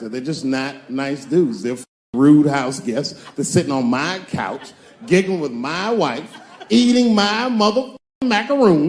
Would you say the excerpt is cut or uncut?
uncut